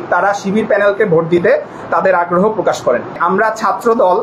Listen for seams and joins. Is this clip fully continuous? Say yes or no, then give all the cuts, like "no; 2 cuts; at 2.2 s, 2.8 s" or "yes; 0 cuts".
no; 1 cut; at 3.2 s